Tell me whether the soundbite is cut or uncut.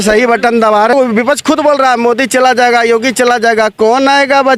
cut